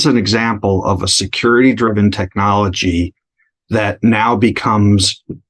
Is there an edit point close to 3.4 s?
no; 0 cuts

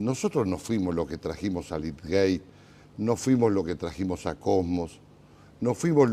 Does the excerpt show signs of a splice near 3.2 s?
yes; 1 cut; at 3.2 s

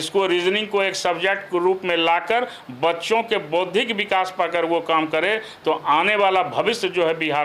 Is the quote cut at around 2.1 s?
no; 0 cuts

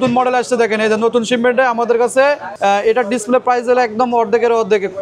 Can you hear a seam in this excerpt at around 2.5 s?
yes; 1 cut; at 2.5 s

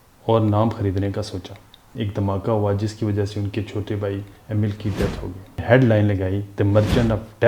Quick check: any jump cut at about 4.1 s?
no; 2 cuts; at 2.0 s, 5.6 s

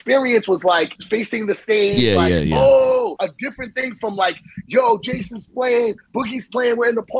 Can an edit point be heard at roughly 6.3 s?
no; 2 cuts; at 1.0 s, 3.2 s

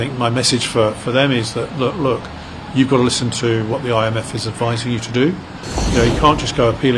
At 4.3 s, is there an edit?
no; 1 cut; at 5.8 s

